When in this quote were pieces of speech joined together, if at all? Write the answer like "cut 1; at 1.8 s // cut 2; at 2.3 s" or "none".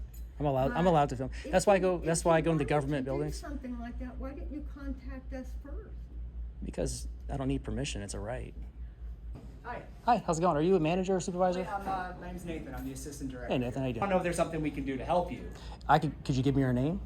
cut 1; at 9.5 s // cut 2; at 14.0 s

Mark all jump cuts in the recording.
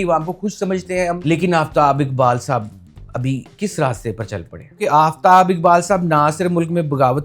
cut 1; at 1.2 s // cut 2; at 4.8 s

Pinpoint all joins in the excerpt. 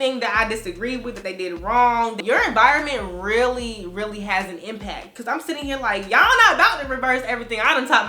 cut 1; at 2.2 s

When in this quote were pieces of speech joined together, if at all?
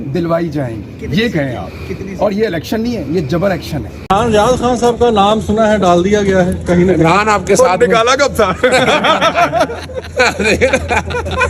cut 1; at 3.9 s

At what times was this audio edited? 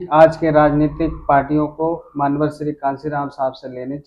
none

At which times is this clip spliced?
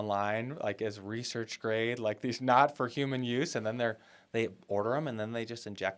none

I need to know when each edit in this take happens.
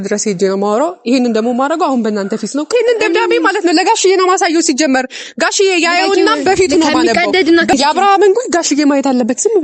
cut 1; at 2.7 s // cut 2; at 7.7 s

